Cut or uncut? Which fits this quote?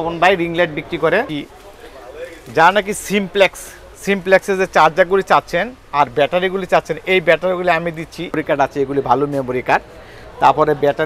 cut